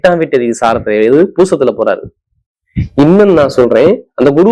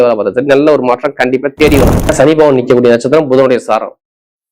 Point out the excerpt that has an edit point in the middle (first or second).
second